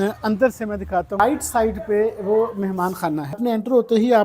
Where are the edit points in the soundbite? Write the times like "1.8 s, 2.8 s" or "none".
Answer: 1.2 s, 3.4 s